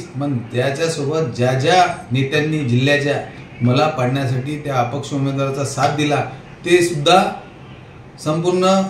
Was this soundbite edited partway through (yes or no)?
no